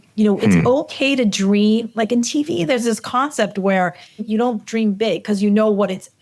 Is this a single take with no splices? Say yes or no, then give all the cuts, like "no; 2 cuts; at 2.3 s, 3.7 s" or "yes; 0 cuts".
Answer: no; 1 cut; at 4.2 s